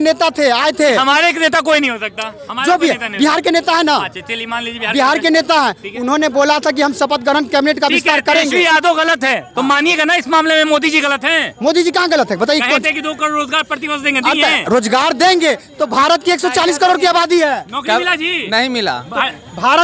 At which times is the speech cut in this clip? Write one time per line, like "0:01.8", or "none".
none